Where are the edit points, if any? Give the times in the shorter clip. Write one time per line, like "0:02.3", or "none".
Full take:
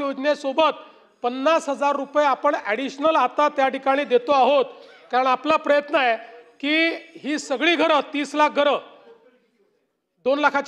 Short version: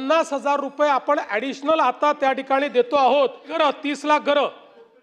0:03.5